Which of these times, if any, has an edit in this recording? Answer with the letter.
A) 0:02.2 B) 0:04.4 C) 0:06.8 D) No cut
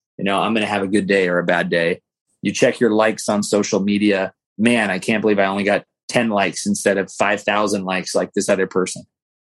B